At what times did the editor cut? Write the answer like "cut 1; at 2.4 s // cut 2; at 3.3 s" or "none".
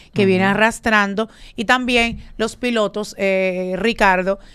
none